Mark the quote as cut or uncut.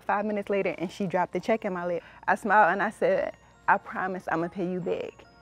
cut